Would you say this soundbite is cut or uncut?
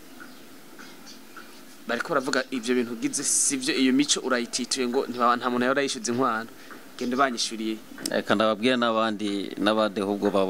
uncut